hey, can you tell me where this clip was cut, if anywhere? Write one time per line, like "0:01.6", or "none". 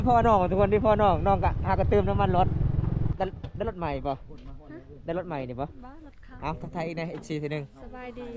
0:03.1